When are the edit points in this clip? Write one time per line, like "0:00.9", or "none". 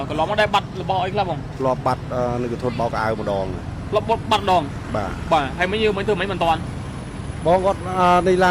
none